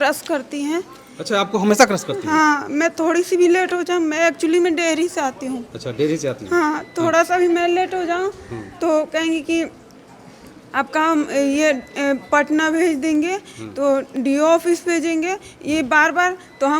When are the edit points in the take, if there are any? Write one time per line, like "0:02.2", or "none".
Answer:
none